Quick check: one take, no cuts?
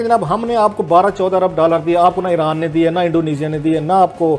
yes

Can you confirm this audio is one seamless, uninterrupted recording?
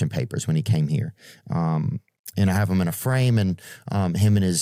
yes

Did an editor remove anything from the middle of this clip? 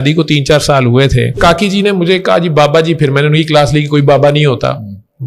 yes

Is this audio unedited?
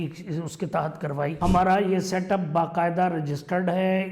no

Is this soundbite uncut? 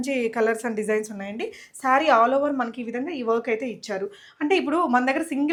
yes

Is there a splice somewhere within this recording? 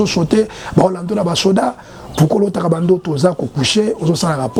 no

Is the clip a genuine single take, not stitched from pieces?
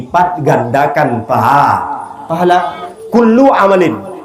no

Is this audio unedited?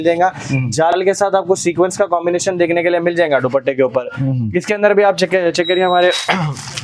yes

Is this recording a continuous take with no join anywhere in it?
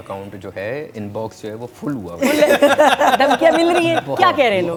yes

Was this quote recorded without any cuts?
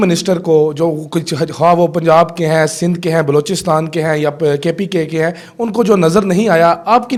yes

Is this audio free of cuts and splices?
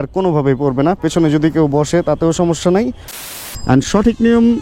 no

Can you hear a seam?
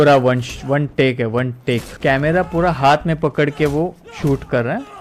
no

